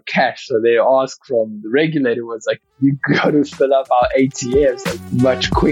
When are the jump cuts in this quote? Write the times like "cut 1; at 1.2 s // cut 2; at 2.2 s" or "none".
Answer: none